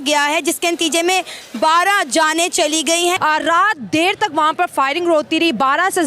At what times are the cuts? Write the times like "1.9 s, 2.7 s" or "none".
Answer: 3.2 s